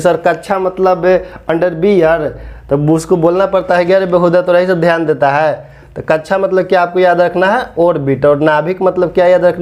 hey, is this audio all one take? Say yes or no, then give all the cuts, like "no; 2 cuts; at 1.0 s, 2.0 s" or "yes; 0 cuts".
yes; 0 cuts